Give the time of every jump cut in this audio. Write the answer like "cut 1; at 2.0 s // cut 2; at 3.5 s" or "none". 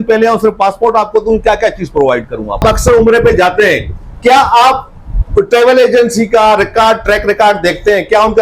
cut 1; at 2.6 s

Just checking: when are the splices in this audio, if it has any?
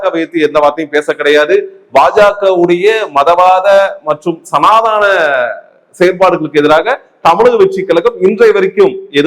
none

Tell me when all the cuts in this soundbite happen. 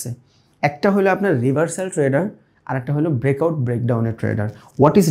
none

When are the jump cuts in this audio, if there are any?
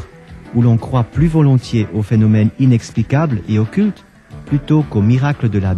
none

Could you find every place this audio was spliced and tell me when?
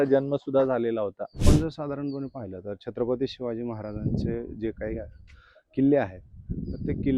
cut 1; at 1.4 s

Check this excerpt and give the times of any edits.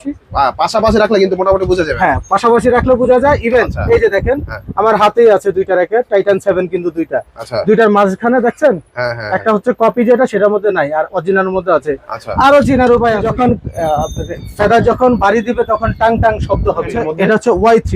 cut 1; at 13.2 s // cut 2; at 17.0 s

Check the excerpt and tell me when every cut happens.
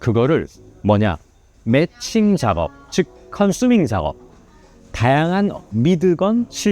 cut 1; at 5.7 s

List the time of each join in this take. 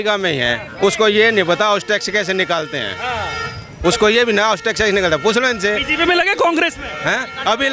none

